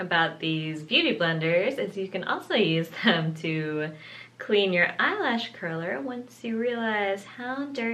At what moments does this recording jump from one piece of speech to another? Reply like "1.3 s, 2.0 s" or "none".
none